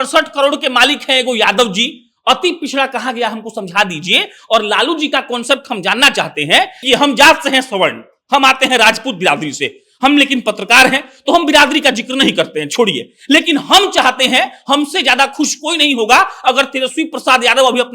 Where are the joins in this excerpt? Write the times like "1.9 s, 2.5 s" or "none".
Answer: 6.8 s